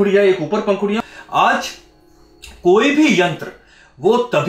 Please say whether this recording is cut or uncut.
cut